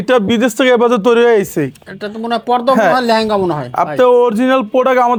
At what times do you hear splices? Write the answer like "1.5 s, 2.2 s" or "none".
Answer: none